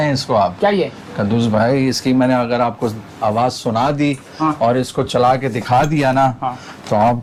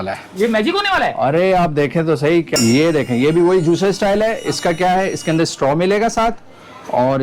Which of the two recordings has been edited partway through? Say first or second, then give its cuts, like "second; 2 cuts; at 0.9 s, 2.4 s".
second; 1 cut; at 2.5 s